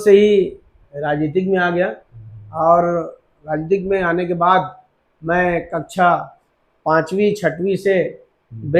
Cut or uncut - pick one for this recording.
uncut